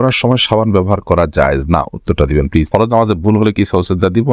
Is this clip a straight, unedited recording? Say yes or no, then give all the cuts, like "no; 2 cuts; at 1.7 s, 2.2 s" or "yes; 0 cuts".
no; 1 cut; at 2.7 s